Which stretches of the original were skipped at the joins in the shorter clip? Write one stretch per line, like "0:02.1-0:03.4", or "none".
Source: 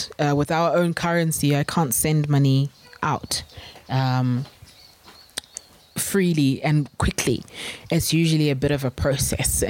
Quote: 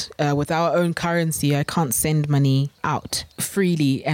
0:02.8-0:05.4

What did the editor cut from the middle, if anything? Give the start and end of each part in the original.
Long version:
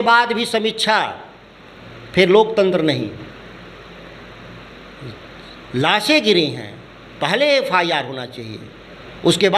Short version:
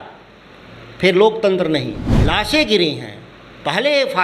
0:03.2-0:05.6

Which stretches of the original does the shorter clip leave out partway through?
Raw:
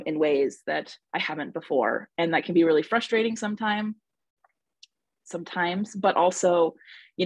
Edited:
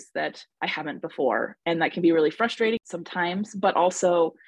0:03.4-0:05.2

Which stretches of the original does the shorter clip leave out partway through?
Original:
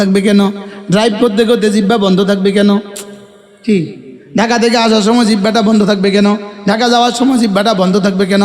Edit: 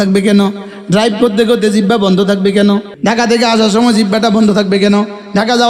0:02.9-0:04.2

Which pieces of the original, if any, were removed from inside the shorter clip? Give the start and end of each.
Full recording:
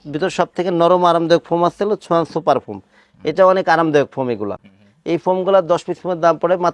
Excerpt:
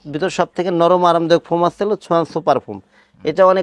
none

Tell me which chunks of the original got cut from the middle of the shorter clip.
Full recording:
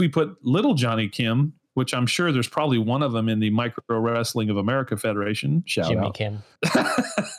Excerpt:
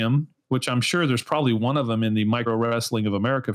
0:03.7-0:03.9

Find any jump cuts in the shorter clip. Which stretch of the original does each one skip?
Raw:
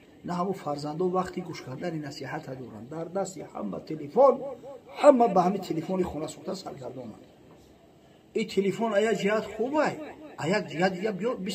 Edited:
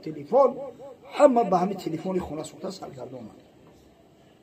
none

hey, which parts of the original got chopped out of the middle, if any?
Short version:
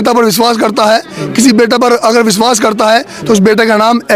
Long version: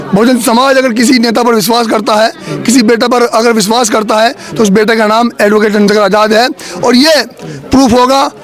none

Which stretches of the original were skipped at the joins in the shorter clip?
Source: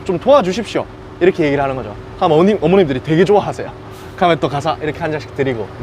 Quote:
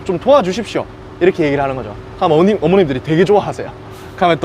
none

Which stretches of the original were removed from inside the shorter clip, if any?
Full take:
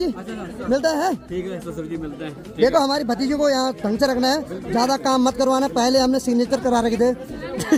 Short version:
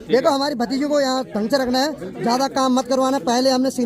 none

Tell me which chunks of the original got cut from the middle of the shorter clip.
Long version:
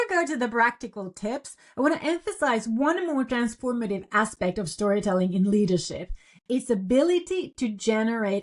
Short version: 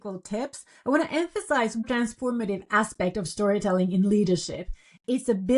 0:02.8-0:03.3

